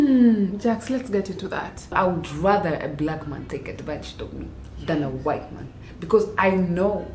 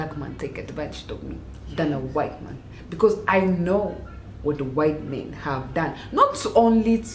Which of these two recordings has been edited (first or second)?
first